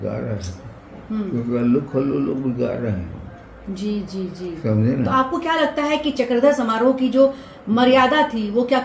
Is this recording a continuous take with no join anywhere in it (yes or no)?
yes